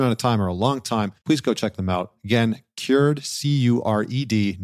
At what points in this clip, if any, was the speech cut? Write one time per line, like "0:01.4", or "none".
0:01.1